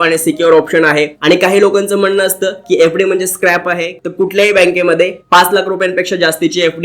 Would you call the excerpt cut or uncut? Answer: cut